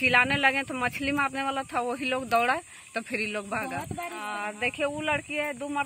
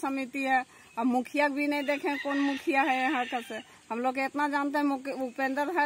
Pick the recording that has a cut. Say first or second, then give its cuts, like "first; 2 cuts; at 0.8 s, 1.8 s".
first; 1 cut; at 4.3 s